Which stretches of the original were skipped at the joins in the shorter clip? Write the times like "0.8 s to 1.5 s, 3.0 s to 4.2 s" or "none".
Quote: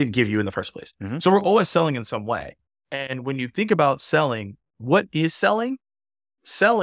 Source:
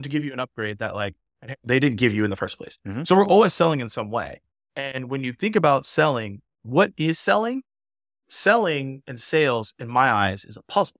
none